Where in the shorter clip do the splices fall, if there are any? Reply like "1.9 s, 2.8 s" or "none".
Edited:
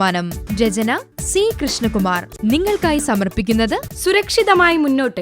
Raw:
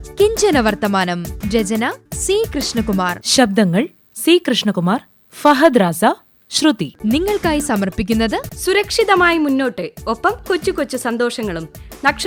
2.3 s

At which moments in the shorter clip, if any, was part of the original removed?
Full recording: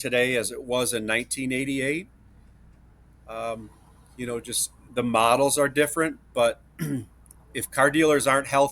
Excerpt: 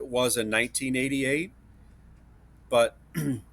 2.6 s

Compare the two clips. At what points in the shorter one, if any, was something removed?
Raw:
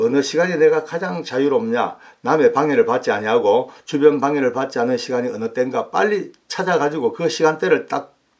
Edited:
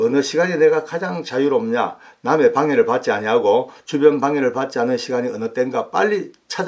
none

